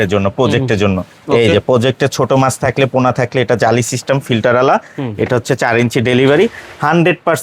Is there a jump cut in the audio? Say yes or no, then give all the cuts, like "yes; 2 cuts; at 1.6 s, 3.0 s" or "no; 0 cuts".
no; 0 cuts